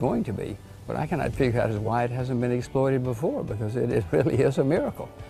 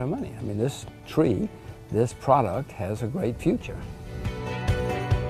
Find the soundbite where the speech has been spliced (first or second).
second